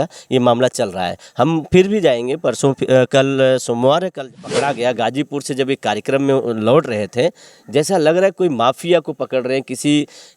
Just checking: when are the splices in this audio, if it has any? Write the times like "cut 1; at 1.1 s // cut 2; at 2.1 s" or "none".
cut 1; at 4.3 s